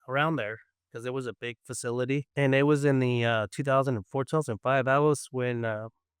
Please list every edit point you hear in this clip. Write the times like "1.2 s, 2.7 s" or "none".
2.3 s